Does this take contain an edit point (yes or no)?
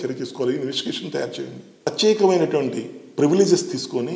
yes